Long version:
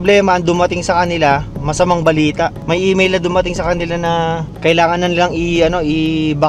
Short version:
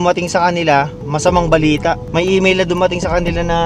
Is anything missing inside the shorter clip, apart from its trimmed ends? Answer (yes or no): no